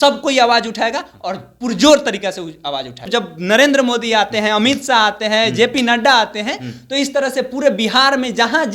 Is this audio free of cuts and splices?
no; 1 cut; at 3.0 s

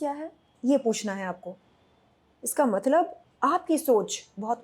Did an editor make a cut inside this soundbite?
yes; 1 cut; at 3.2 s

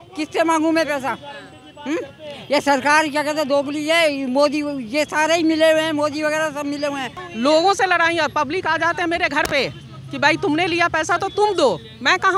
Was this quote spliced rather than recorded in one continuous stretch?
yes; 1 cut; at 7.2 s

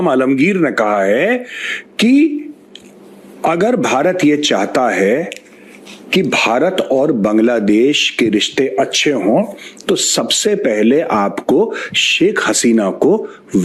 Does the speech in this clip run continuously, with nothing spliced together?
yes; 0 cuts

